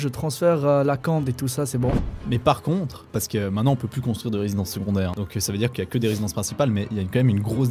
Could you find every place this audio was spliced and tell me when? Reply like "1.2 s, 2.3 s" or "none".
2.1 s, 3.1 s, 5.1 s